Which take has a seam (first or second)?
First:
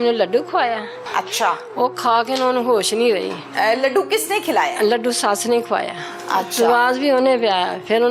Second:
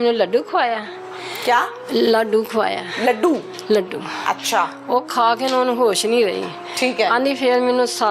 first